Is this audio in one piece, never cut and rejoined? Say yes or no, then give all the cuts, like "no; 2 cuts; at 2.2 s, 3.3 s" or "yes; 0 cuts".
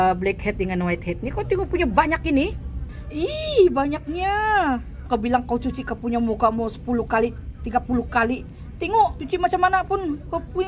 no; 3 cuts; at 2.8 s, 4.9 s, 9.2 s